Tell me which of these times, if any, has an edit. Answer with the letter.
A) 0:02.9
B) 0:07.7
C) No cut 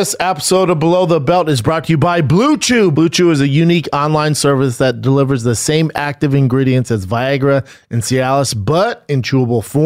A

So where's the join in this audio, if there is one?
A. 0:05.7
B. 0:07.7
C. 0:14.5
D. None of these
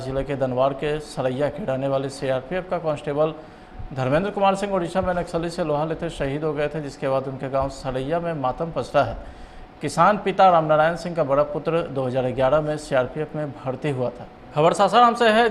C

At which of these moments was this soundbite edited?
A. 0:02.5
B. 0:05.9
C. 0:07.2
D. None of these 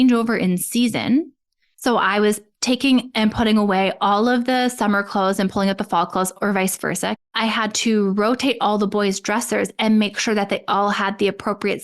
C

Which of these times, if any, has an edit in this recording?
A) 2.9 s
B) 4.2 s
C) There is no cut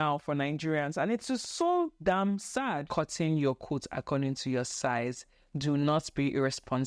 A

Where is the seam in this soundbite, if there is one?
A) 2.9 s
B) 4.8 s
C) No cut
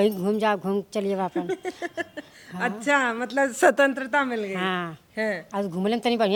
C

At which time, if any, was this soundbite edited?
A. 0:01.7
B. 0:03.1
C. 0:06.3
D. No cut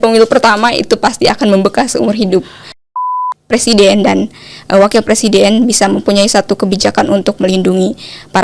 B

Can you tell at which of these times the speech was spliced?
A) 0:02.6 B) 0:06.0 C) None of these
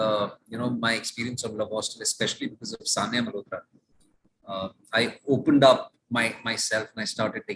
C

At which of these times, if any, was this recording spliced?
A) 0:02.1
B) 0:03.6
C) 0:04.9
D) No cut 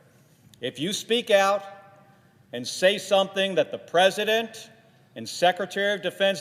D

